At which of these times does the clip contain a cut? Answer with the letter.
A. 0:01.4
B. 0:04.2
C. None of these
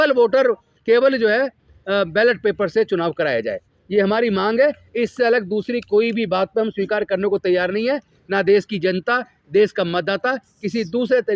C